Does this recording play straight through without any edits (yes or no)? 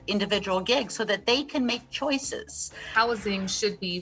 no